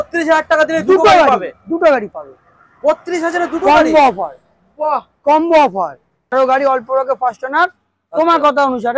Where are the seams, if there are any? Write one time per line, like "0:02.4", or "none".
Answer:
0:06.3